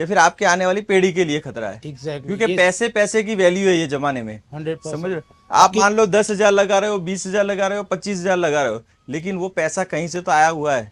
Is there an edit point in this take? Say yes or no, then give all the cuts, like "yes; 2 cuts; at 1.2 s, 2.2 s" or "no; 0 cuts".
no; 0 cuts